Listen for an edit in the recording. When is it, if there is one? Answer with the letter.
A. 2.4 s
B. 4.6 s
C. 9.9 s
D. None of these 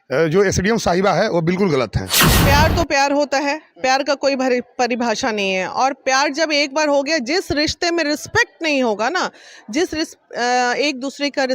A